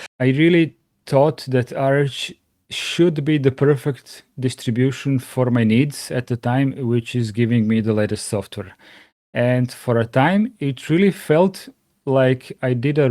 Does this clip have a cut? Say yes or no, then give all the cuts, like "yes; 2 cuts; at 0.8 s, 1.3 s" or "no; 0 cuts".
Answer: no; 0 cuts